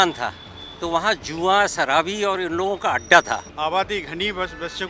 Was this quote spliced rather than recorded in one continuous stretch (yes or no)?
yes